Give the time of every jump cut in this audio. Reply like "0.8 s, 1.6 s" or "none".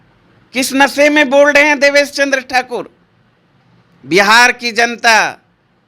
none